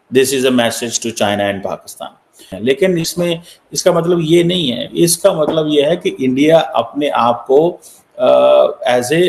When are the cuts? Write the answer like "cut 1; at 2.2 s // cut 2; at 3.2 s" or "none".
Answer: cut 1; at 2.5 s